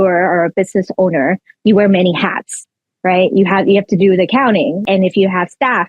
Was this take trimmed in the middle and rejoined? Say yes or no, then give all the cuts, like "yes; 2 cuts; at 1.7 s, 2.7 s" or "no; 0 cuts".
yes; 1 cut; at 4.8 s